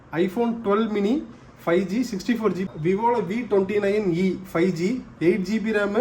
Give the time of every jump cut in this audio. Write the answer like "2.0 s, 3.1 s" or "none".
2.7 s